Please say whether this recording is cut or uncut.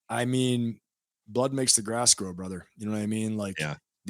uncut